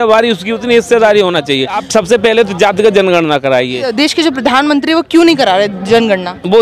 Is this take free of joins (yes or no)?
no